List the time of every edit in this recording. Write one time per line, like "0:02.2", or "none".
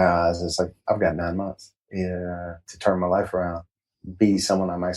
0:03.7